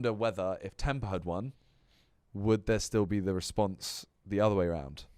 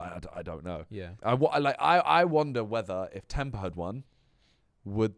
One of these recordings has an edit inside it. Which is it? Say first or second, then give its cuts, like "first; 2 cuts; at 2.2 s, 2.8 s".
second; 1 cut; at 1.1 s